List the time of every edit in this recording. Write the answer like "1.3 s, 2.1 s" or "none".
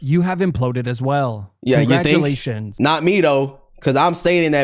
2.8 s